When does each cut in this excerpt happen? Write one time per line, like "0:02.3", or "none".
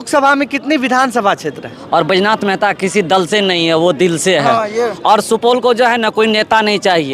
0:01.7